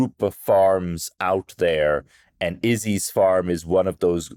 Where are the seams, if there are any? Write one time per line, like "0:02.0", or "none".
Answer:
none